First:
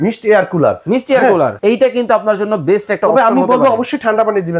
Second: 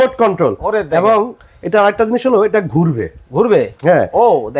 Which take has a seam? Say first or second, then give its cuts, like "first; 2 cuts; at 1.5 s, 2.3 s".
first; 1 cut; at 1.6 s